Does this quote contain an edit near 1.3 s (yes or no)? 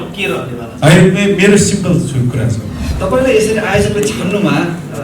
no